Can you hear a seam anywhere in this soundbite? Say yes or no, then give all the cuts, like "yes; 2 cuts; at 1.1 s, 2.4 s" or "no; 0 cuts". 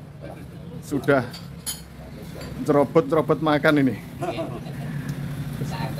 no; 0 cuts